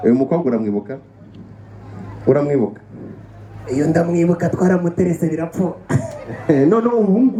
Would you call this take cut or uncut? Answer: uncut